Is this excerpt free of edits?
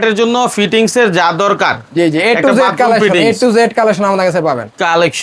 yes; 0 cuts

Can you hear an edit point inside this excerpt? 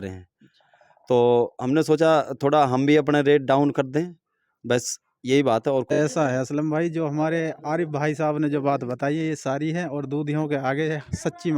yes; 1 cut; at 5.9 s

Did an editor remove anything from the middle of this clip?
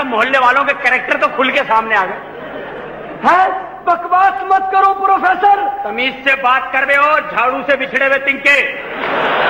no; 0 cuts

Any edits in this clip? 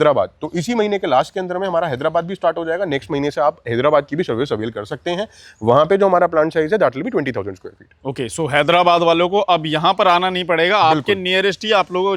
no; 0 cuts

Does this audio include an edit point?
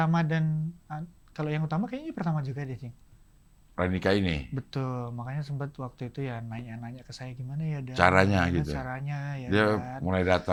no; 0 cuts

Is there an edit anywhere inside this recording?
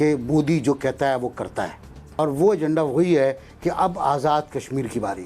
yes; 1 cut; at 2.2 s

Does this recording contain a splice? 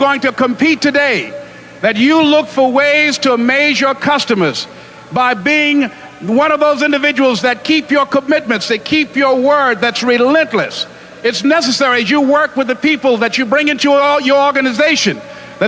no; 0 cuts

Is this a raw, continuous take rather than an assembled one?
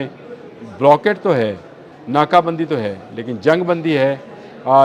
yes; 0 cuts

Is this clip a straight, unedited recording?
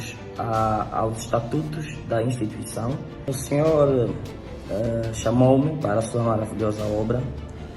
no; 1 cut; at 3.3 s

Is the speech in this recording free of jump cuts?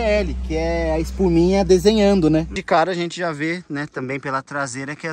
no; 1 cut; at 2.6 s

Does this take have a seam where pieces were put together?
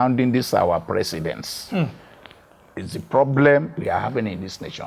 no; 0 cuts

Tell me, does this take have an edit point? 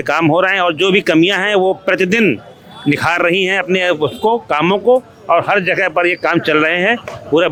no; 0 cuts

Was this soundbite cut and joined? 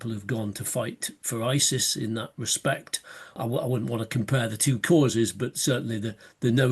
yes; 1 cut; at 3.4 s

